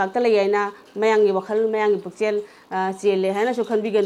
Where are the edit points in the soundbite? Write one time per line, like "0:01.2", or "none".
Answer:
none